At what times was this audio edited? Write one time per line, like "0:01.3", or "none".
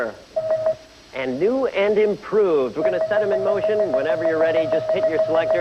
0:02.3